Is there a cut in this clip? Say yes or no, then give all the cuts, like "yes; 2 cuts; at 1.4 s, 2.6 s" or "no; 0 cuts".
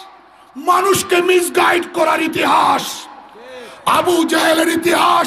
no; 0 cuts